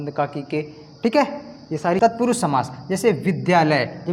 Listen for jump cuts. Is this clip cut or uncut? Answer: cut